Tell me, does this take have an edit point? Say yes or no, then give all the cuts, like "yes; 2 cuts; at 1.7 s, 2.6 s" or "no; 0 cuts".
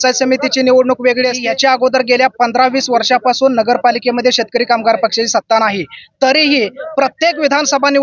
yes; 1 cut; at 1.4 s